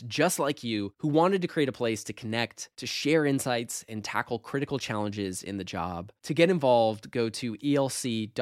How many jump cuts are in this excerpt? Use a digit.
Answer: 0